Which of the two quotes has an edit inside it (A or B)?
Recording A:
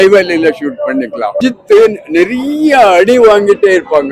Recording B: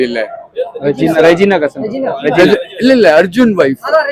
A